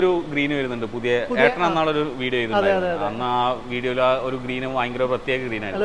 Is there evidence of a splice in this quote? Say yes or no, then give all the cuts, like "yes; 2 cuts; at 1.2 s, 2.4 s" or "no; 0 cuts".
no; 0 cuts